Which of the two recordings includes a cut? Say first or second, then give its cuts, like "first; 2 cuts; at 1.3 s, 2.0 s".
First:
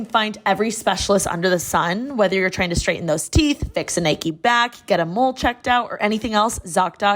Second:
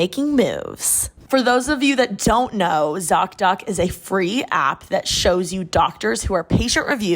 second; 1 cut; at 1.1 s